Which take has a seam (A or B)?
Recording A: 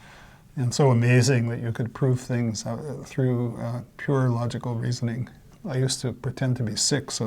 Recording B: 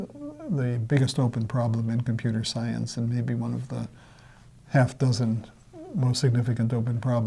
A